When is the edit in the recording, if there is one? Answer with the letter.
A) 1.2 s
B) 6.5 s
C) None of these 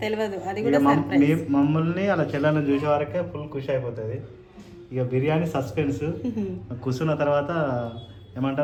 C